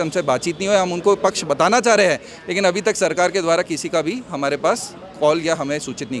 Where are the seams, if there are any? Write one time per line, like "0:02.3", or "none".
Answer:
none